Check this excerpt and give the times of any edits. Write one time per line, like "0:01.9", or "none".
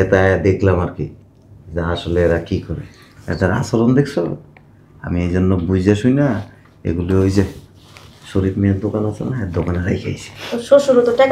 none